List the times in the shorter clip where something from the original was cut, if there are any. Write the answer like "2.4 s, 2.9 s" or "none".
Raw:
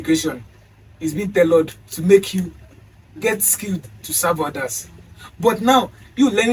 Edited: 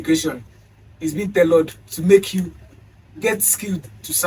none